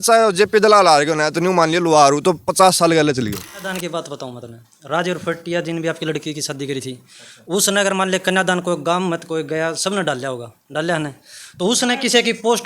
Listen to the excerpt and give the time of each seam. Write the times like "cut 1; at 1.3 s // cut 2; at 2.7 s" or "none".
cut 1; at 3.7 s